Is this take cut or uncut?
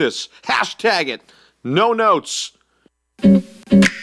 cut